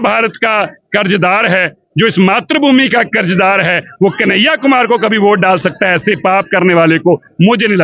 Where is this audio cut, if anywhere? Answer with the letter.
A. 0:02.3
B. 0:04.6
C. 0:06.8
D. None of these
D